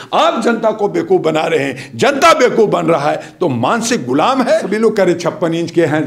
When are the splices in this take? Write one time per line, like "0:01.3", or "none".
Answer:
0:04.7